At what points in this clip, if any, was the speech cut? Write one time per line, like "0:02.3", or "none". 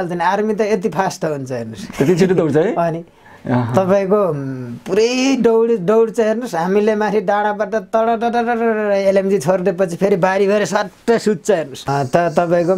0:11.9